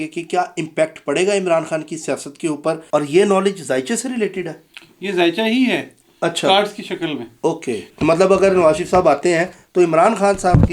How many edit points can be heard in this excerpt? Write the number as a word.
two